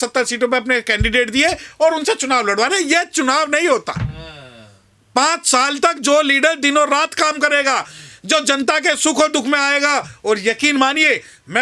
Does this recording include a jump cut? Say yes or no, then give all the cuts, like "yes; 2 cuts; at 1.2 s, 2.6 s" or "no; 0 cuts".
no; 0 cuts